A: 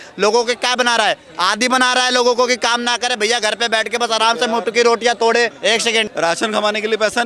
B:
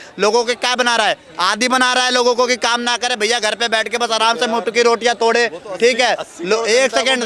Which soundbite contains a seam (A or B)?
A